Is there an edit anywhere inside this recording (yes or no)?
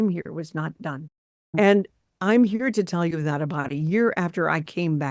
yes